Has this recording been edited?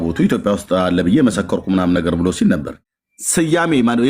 yes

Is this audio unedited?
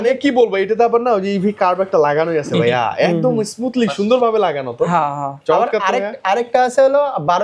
yes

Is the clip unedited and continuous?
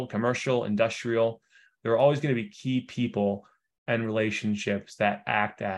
yes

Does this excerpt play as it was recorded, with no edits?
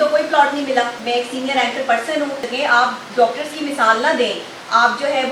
no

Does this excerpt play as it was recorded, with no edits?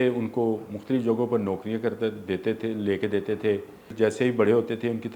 no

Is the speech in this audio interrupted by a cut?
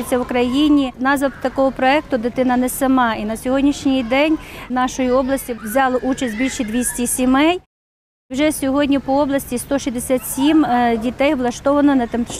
yes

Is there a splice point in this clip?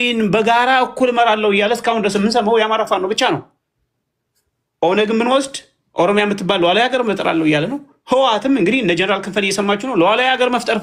no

